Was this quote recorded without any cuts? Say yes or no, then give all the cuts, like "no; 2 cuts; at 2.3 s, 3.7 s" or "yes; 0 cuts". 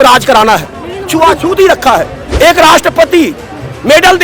no; 1 cut; at 2.2 s